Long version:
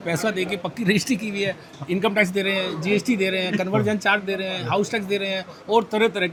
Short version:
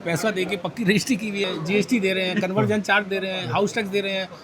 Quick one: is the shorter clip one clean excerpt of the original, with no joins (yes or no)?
no